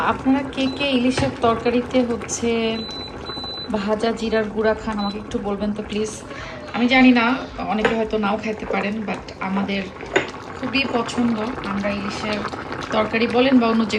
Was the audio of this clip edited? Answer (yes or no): no